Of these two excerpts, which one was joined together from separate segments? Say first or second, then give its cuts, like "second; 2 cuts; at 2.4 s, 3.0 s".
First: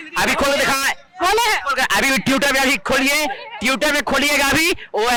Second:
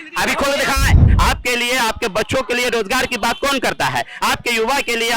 second; 1 cut; at 1.1 s